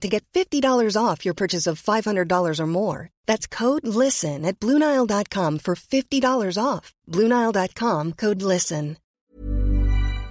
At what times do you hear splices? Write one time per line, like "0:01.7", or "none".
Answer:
0:09.0